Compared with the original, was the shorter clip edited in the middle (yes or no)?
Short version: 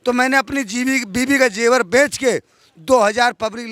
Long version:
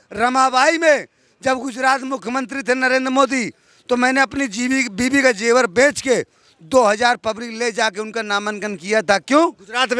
no